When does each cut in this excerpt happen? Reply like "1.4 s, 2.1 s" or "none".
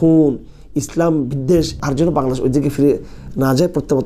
1.8 s